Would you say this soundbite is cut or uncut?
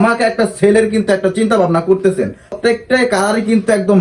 cut